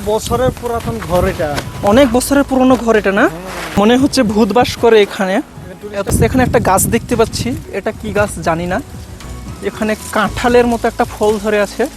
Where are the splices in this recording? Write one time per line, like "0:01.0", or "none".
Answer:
0:03.9
0:05.9